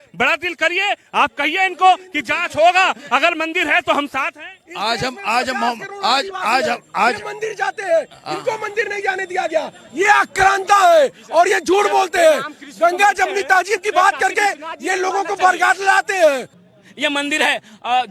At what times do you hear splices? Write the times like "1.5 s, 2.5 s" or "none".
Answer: 16.6 s